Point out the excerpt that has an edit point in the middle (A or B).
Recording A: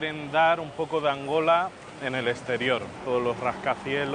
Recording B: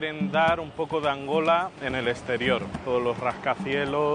B